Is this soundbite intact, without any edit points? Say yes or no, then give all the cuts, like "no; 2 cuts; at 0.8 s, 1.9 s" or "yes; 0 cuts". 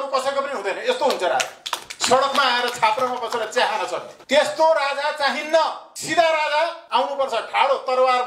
no; 2 cuts; at 4.1 s, 6.8 s